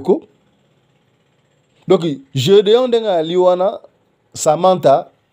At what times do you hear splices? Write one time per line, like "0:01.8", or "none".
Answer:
none